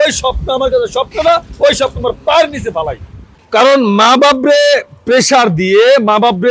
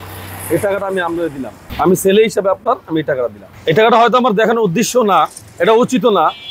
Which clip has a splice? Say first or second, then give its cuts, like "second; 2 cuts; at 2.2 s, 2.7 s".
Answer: first; 1 cut; at 3.3 s